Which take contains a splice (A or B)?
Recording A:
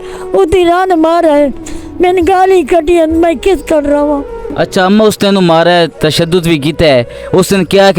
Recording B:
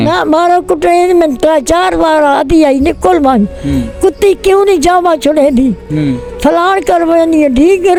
A